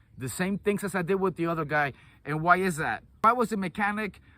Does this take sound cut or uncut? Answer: cut